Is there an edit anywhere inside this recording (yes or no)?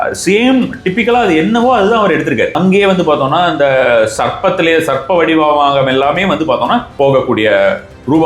yes